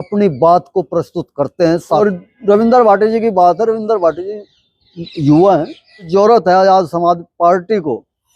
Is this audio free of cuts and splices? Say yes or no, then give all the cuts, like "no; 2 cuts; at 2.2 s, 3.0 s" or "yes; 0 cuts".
no; 2 cuts; at 2.0 s, 6.1 s